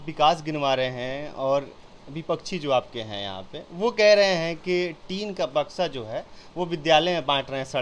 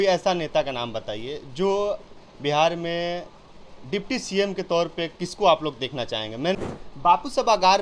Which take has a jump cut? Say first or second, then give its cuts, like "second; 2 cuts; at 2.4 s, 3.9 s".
second; 1 cut; at 6.6 s